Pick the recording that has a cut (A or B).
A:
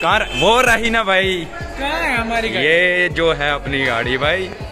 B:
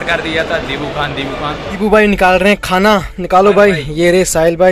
B